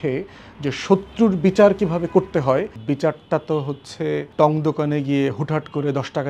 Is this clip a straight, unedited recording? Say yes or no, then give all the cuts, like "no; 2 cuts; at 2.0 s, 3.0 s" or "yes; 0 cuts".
no; 2 cuts; at 2.8 s, 4.3 s